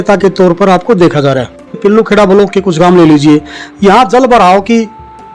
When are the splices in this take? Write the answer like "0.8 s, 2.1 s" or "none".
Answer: 2.1 s